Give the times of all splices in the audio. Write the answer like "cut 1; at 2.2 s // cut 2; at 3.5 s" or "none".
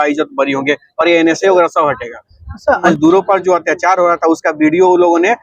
cut 1; at 2.9 s